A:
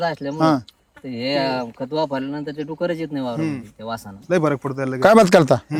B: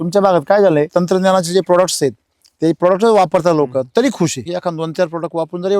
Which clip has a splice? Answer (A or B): B